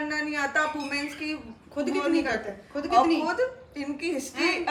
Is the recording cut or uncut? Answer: uncut